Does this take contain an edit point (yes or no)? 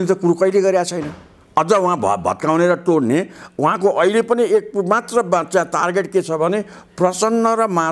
no